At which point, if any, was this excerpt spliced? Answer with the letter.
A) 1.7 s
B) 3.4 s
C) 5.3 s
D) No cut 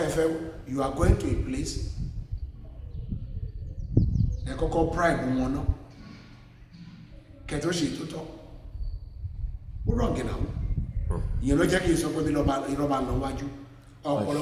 D